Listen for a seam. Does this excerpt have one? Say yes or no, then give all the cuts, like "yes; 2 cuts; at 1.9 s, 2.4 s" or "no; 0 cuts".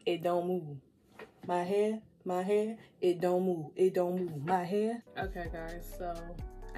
no; 0 cuts